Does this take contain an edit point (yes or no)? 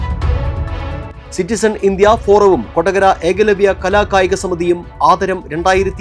yes